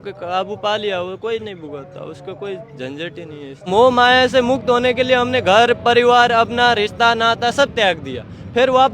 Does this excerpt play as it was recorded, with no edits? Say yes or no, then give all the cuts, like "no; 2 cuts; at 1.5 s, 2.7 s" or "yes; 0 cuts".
no; 1 cut; at 3.7 s